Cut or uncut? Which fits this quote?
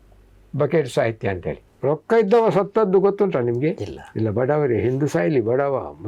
cut